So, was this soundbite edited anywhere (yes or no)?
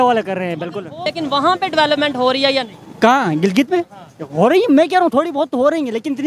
yes